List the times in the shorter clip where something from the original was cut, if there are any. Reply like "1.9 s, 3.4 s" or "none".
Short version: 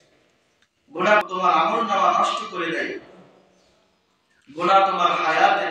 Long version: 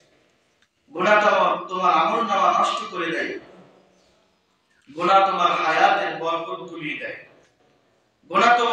1.2 s